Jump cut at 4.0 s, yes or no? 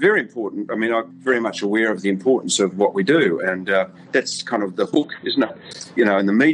no